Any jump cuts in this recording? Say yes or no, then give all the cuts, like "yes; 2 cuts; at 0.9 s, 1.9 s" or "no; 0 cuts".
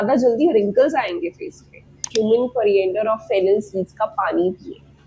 yes; 1 cut; at 2.1 s